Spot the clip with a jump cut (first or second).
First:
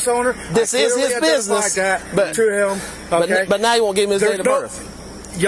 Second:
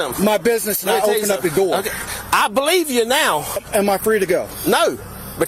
second